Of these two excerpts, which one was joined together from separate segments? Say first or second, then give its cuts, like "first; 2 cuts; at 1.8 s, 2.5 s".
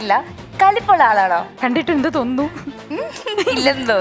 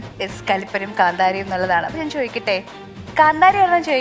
first; 2 cuts; at 1.6 s, 2.8 s